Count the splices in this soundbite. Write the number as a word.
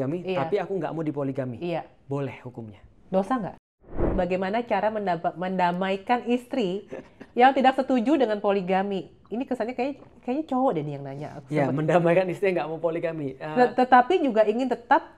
one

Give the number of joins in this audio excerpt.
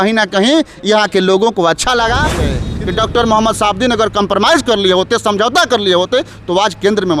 one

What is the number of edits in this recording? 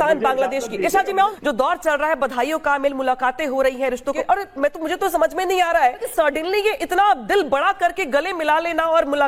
three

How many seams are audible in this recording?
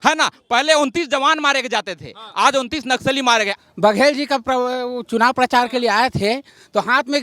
one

